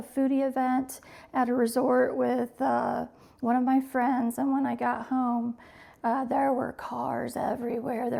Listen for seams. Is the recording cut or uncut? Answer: uncut